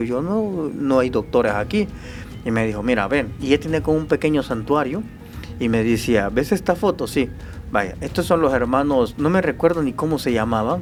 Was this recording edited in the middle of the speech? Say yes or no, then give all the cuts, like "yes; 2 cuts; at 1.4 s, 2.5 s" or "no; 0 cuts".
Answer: no; 0 cuts